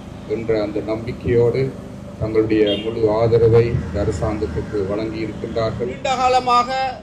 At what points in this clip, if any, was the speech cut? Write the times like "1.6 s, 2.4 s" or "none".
6.1 s